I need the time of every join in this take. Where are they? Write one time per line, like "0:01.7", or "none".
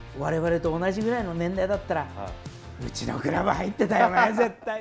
none